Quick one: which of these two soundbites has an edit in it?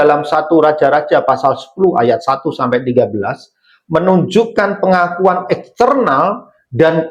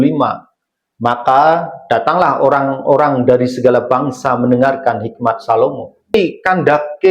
second; 1 cut; at 6.1 s

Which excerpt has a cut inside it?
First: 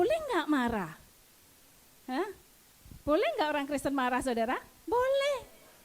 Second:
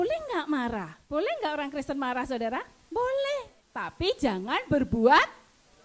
second; 2 cuts; at 1.0 s, 3.6 s

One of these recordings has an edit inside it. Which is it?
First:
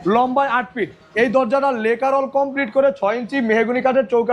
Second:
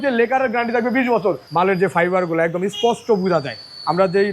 second; 1 cut; at 1.4 s

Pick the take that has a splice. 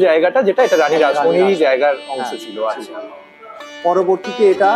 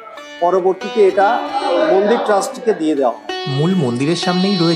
second; 1 cut; at 3.5 s

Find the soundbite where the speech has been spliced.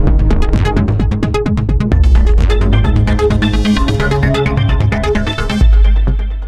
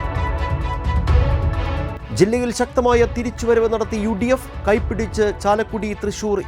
second; 1 cut; at 2.0 s

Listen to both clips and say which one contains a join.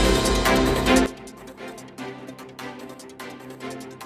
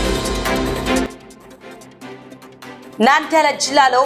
second; 2 cuts; at 1.1 s, 2.9 s

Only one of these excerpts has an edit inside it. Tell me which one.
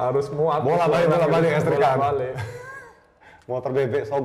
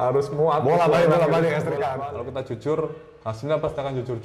second; 1 cut; at 2.0 s

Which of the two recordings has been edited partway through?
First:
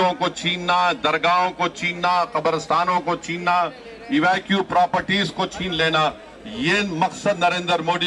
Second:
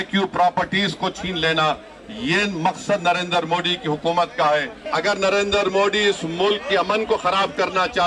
second; 1 cut; at 4.8 s

